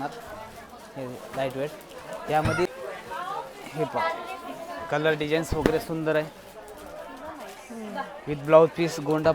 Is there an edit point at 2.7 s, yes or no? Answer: yes